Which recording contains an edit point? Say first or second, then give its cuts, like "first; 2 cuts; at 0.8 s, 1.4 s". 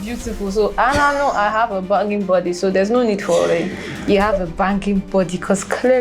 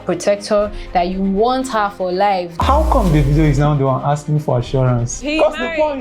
second; 2 cuts; at 2.5 s, 5.2 s